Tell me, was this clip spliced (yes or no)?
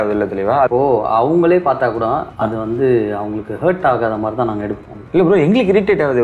yes